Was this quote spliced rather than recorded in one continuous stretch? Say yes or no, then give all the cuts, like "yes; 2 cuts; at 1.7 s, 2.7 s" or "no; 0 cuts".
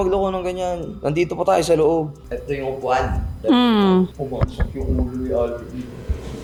no; 0 cuts